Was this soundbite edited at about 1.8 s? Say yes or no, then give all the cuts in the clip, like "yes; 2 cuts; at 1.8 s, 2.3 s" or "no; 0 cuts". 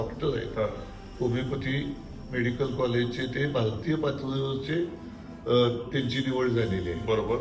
no; 0 cuts